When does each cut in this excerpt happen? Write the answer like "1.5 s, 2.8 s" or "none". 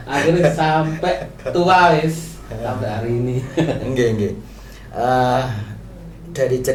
none